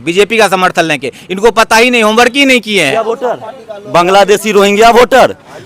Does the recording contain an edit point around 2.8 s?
yes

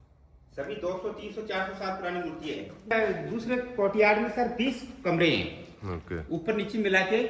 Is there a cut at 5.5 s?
no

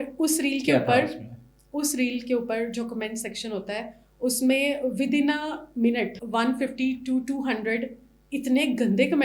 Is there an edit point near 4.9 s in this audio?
no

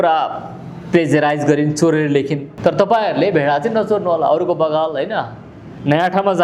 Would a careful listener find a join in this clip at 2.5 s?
yes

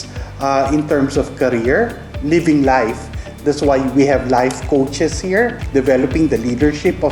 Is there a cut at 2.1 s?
yes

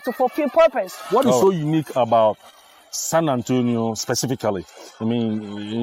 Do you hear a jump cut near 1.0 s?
yes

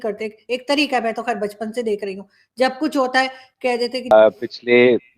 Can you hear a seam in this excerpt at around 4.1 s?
yes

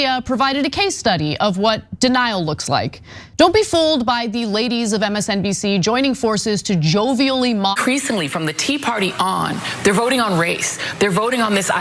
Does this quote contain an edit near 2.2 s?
no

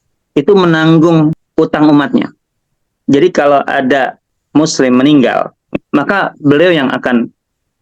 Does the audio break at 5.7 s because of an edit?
yes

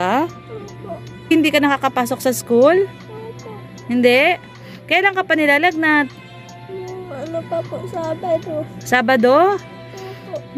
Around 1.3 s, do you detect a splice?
yes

